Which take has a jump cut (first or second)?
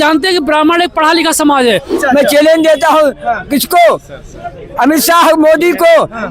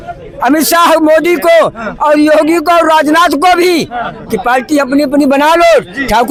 first